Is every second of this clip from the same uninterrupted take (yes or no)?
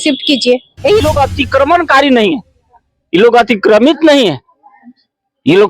no